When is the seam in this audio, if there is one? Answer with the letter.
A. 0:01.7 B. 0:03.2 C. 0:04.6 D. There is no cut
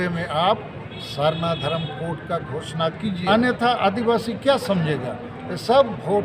B